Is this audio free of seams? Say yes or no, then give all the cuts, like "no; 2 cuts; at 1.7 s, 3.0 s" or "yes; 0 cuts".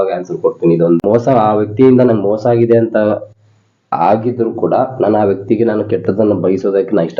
no; 1 cut; at 1.1 s